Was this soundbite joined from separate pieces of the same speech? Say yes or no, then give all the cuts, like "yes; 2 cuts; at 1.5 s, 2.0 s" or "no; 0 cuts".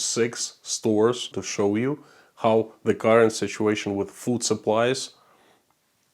yes; 1 cut; at 1.3 s